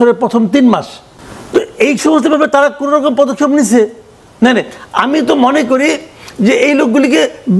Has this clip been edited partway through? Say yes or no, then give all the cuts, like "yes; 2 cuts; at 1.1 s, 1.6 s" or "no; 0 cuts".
no; 0 cuts